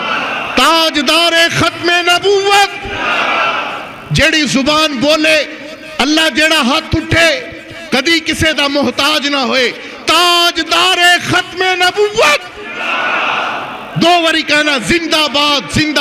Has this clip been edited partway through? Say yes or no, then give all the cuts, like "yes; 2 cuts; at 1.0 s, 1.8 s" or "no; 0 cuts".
no; 0 cuts